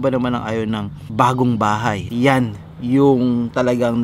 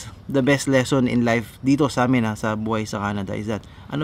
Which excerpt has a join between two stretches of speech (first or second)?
first